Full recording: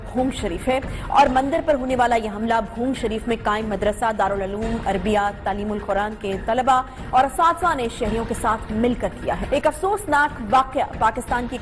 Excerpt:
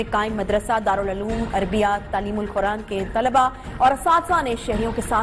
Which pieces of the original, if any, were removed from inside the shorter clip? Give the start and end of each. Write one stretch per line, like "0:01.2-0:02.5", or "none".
none